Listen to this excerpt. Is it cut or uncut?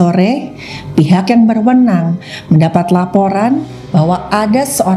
uncut